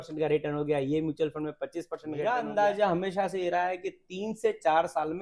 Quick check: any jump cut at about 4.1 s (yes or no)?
no